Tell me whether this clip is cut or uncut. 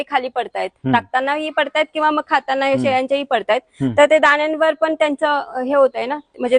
uncut